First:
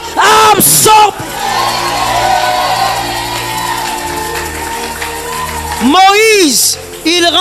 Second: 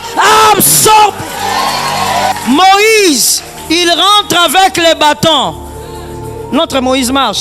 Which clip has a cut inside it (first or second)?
second